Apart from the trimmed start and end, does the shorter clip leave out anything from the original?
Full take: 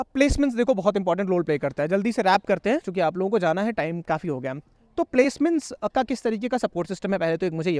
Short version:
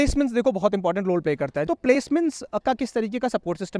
yes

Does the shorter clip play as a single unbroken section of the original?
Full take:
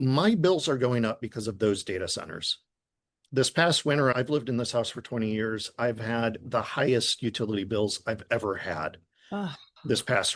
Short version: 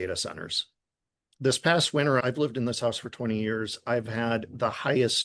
yes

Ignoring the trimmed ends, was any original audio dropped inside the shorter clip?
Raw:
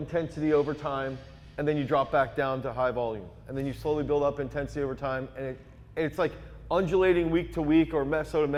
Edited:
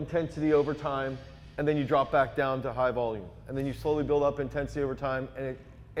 no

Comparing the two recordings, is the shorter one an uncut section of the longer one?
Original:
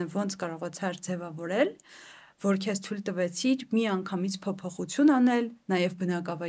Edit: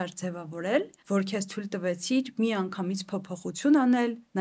no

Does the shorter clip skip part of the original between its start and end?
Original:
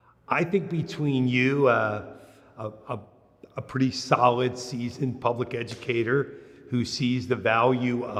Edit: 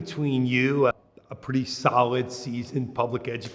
yes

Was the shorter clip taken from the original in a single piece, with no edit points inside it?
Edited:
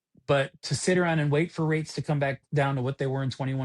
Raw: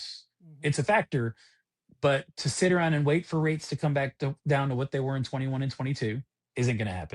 no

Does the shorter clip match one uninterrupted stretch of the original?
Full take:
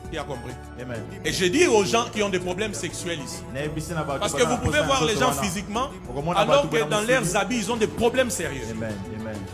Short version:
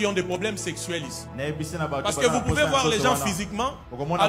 yes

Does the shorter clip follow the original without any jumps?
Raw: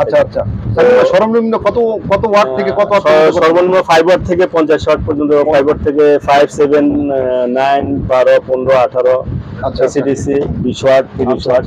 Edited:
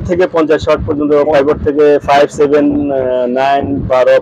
yes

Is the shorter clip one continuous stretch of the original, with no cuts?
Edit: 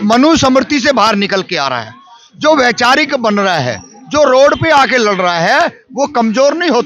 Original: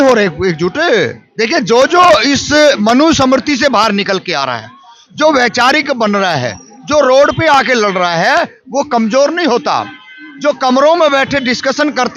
yes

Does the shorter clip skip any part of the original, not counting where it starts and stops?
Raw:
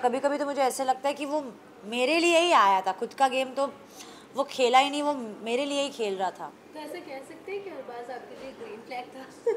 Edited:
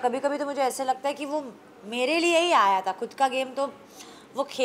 no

